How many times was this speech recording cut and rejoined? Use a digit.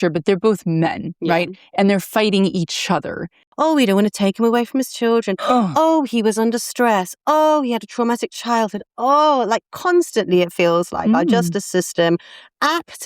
1